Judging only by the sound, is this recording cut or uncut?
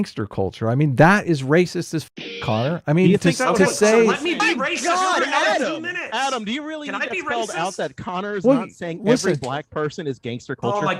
uncut